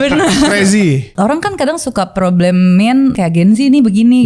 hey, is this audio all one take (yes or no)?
no